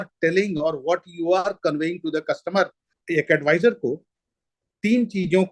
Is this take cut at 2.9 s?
yes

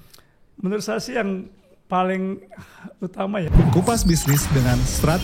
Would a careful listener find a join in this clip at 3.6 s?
yes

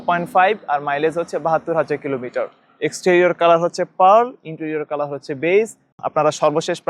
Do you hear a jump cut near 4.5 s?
no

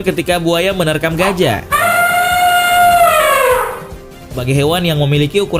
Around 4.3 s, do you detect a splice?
yes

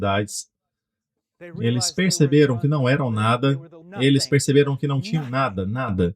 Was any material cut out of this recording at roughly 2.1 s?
no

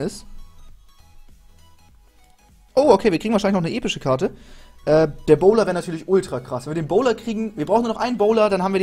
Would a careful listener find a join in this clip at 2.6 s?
no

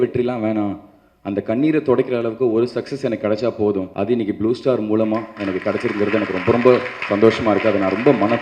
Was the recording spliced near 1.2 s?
no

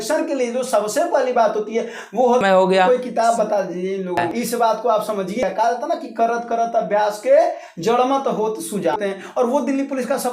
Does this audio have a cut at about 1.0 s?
no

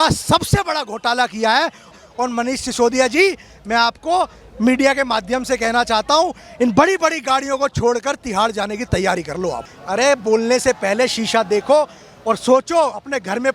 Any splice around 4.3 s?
no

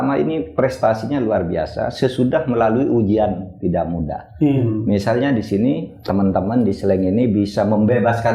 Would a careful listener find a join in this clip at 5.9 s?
yes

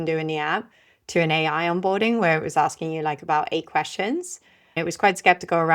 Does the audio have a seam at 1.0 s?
no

